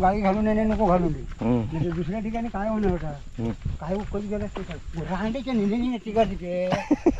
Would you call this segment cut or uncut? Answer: uncut